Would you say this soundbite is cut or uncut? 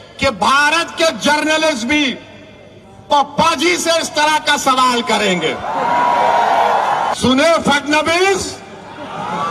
cut